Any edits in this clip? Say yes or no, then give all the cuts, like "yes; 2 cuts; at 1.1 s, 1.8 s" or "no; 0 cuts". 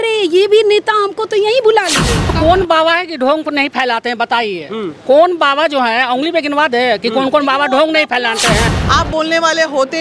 yes; 2 cuts; at 2.3 s, 8.7 s